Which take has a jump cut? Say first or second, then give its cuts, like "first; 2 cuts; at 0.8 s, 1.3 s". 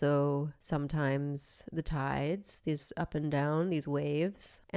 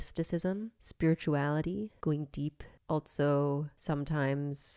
second; 1 cut; at 1.9 s